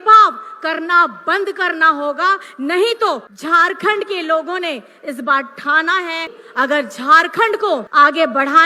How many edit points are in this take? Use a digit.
3